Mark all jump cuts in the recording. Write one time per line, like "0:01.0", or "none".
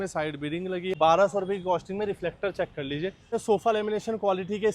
0:00.9
0:03.3

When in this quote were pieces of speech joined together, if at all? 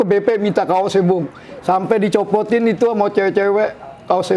none

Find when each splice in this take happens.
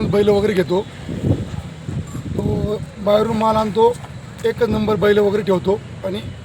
none

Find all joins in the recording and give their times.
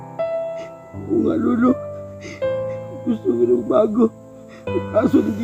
0:00.9

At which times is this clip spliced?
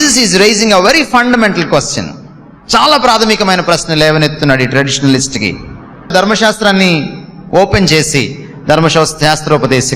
0:06.1

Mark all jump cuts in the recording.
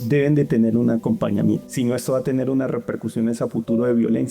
0:01.7

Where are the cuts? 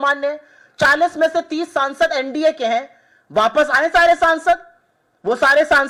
none

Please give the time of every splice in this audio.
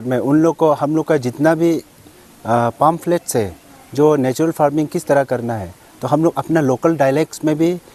none

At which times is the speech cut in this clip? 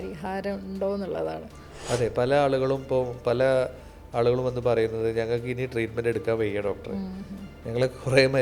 none

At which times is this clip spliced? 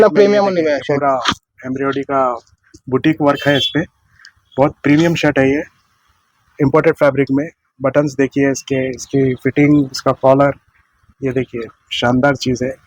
none

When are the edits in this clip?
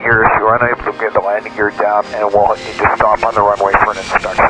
0:01.9

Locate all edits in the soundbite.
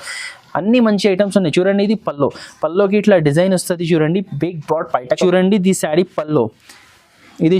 0:05.1

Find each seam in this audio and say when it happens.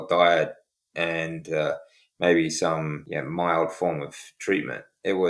0:03.0

